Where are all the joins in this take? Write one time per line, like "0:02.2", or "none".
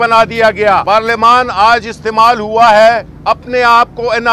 0:00.8
0:03.1